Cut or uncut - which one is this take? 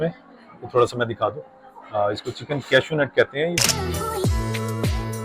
cut